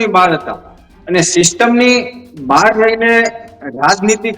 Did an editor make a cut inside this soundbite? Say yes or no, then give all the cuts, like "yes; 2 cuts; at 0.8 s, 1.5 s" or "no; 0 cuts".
no; 0 cuts